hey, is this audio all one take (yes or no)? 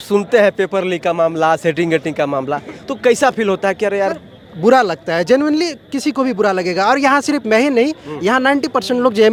yes